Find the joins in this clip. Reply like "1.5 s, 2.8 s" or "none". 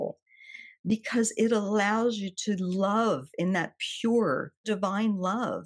4.7 s